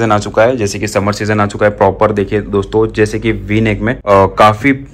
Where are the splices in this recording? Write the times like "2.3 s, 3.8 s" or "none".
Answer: 4.0 s